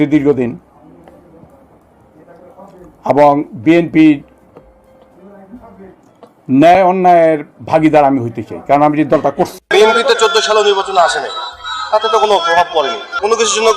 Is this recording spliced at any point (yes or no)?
yes